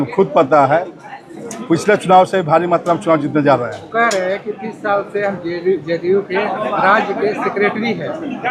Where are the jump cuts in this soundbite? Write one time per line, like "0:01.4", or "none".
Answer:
none